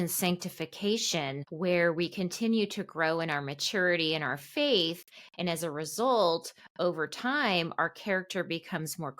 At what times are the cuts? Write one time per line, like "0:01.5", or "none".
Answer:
0:01.4